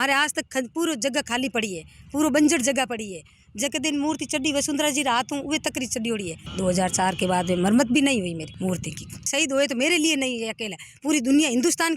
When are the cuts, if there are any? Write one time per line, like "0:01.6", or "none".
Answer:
0:06.4
0:09.3